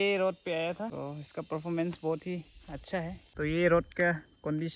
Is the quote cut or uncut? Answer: cut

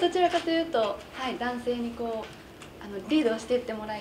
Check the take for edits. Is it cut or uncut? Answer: uncut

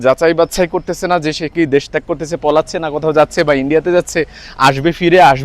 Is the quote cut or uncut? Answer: uncut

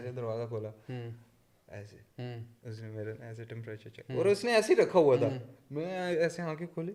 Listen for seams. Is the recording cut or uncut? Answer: uncut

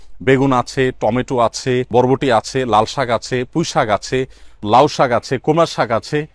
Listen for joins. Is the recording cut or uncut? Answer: cut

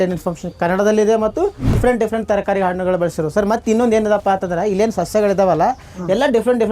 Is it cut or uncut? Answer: cut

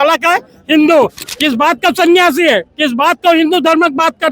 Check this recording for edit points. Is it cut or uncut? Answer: cut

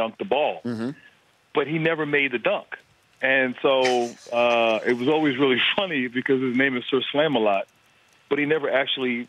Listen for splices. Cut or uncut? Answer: cut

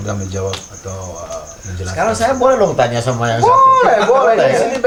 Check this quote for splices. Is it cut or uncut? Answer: uncut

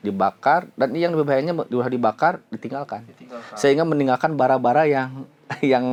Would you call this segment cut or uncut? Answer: uncut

